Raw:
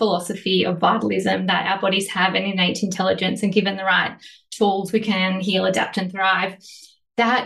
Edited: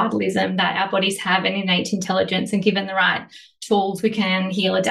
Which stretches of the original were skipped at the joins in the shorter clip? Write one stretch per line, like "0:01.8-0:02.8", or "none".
none